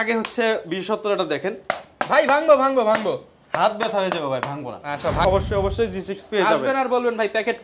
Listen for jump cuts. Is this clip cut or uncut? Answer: cut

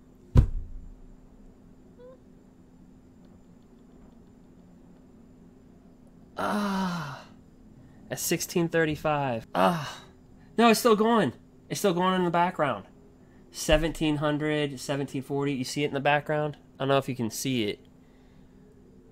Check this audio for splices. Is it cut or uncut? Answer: cut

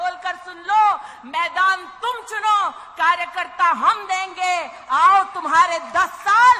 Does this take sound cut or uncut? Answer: uncut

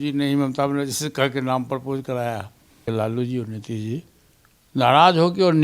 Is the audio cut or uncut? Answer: cut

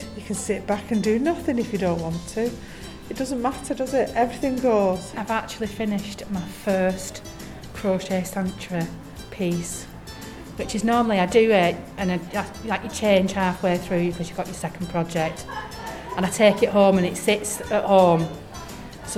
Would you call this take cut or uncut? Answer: cut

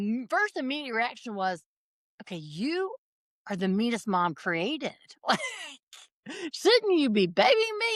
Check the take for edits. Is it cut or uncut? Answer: uncut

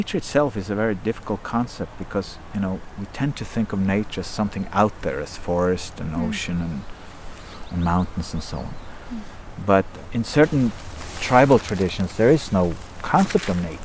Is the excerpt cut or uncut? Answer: cut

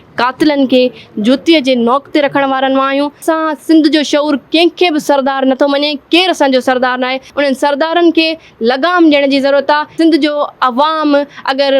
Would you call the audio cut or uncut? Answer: cut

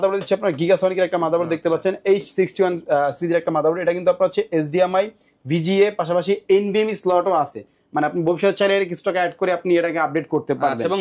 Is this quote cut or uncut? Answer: uncut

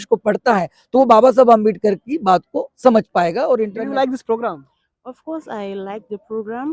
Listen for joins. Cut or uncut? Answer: cut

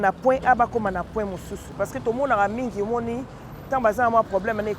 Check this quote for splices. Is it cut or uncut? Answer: cut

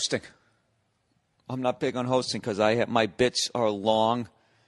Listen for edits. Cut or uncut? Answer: uncut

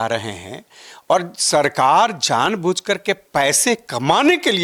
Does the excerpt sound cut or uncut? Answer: uncut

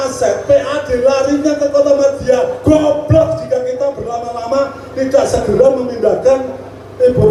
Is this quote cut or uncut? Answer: uncut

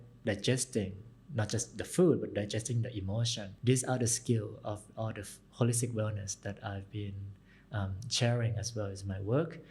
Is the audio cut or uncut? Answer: cut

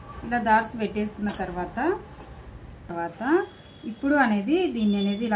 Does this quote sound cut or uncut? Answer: cut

